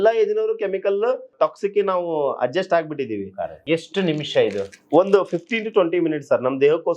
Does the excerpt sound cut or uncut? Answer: cut